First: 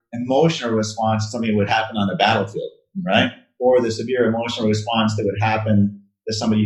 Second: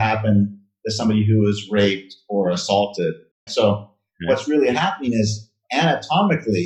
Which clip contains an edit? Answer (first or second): second